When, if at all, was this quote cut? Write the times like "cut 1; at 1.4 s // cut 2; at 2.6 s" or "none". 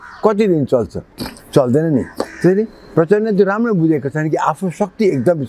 none